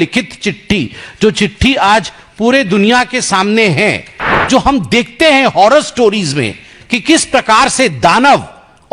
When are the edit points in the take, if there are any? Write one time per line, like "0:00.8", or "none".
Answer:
0:04.2